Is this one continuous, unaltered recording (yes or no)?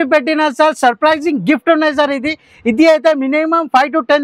yes